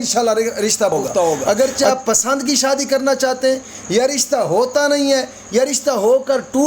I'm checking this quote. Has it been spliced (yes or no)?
yes